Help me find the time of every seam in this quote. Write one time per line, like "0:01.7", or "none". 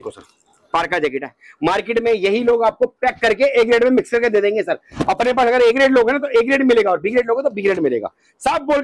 none